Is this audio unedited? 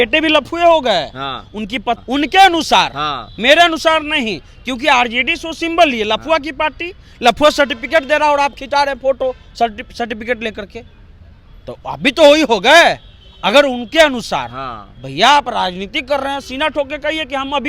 yes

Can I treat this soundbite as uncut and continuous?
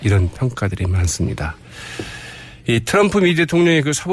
yes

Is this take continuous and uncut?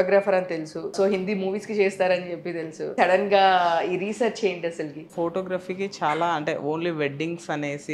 no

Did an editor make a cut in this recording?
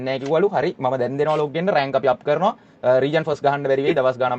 no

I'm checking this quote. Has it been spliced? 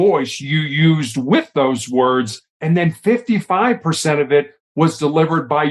no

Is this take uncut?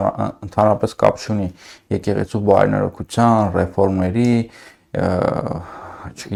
yes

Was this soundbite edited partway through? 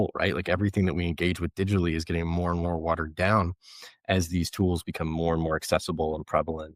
no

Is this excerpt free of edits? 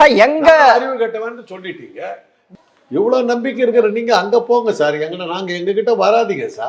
no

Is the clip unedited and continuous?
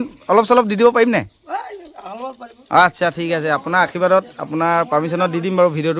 yes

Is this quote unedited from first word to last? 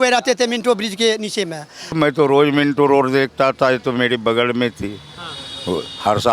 no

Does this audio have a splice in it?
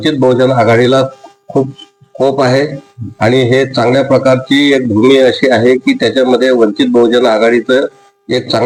no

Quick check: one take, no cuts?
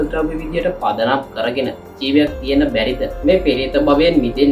no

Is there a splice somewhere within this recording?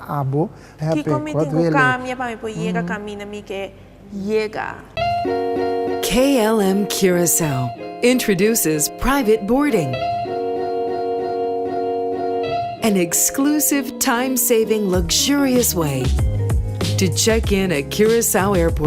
yes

